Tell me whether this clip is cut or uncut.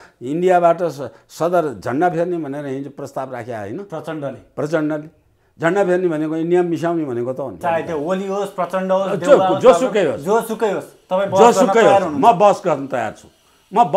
cut